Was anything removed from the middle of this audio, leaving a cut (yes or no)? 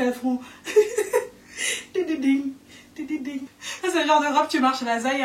yes